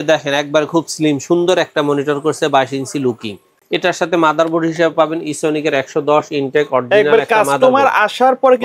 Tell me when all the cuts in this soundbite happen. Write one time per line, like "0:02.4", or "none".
0:03.5